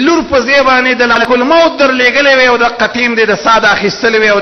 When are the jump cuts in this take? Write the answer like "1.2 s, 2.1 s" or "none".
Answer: 1.2 s